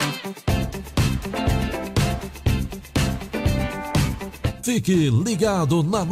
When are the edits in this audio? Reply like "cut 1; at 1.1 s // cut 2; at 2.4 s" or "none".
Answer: cut 1; at 4.5 s